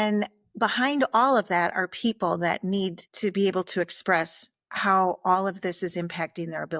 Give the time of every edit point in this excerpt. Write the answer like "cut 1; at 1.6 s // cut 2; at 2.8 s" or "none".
cut 1; at 3.1 s